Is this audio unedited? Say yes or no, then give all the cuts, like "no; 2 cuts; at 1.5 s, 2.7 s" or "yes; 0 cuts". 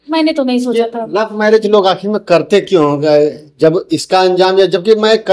yes; 0 cuts